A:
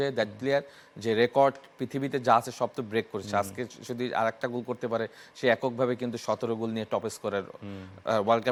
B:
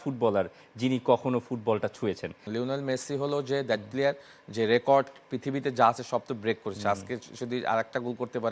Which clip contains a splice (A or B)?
B